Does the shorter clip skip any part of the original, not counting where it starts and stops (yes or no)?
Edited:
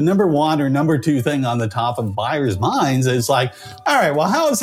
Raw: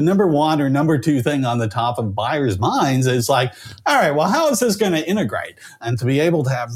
no